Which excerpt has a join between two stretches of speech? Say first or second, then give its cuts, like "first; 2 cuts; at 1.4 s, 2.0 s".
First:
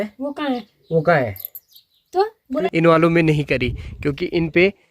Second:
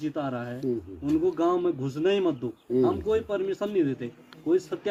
first; 1 cut; at 2.6 s